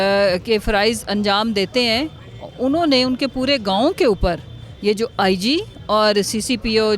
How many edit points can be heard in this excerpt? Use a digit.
0